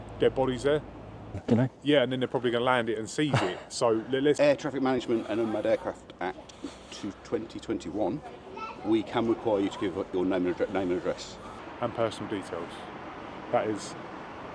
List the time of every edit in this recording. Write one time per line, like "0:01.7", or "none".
0:01.4
0:04.4
0:11.6